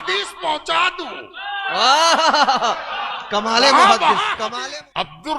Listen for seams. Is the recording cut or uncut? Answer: cut